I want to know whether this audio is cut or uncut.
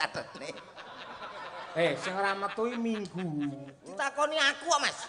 cut